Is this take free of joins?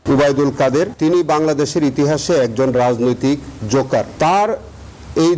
no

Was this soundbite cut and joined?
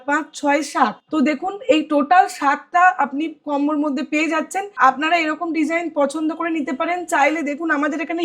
yes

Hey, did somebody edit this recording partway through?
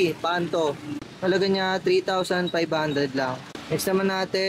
no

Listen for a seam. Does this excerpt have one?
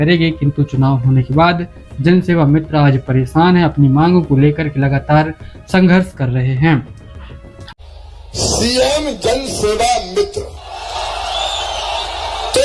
no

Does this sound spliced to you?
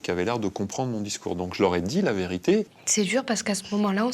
yes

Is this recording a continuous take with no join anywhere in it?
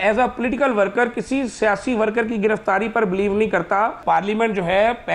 no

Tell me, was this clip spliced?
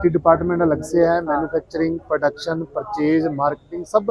no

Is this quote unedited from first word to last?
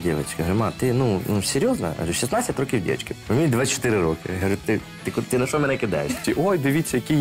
no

